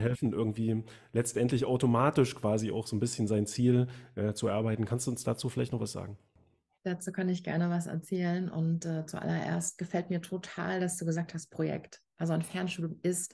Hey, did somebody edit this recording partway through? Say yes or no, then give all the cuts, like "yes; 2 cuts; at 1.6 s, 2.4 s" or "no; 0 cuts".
no; 0 cuts